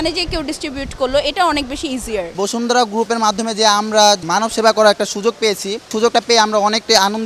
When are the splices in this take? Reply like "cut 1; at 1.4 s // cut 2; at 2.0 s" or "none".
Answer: cut 1; at 2.3 s // cut 2; at 4.2 s // cut 3; at 5.9 s